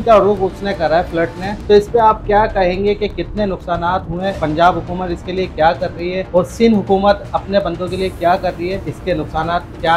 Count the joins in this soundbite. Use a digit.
4